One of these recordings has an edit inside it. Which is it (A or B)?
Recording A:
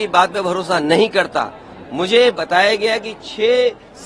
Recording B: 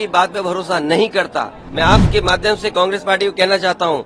B